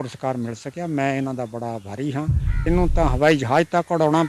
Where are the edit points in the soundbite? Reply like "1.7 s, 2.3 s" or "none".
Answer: 2.6 s